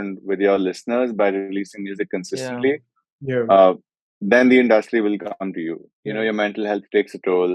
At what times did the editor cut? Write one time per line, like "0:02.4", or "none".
0:05.9